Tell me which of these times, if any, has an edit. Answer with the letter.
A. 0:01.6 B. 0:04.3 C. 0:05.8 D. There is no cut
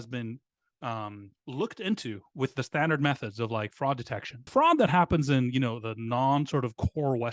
B